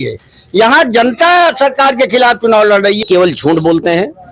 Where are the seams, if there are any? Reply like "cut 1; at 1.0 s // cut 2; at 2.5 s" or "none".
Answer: cut 1; at 3.0 s